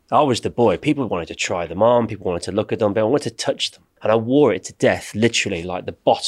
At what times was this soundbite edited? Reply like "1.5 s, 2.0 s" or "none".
3.9 s